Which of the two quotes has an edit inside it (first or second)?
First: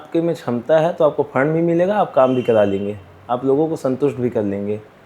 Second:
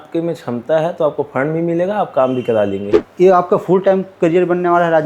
second